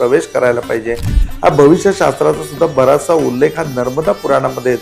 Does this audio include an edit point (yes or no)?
yes